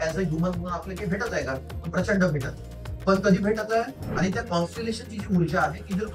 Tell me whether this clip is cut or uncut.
cut